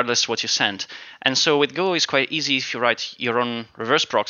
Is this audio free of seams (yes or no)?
yes